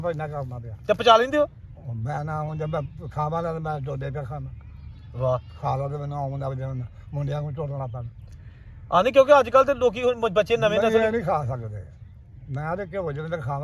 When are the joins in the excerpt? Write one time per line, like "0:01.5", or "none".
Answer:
none